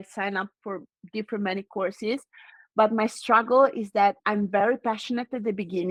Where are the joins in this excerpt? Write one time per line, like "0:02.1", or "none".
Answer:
none